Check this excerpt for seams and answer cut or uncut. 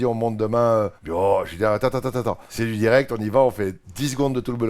cut